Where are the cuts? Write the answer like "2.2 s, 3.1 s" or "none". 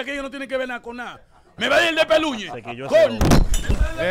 none